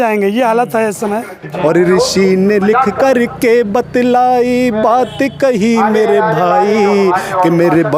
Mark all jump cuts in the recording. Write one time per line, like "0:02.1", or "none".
0:01.5